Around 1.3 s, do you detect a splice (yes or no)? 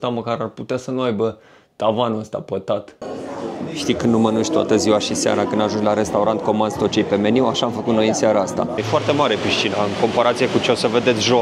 no